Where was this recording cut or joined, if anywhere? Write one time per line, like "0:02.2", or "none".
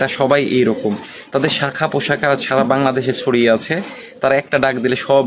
none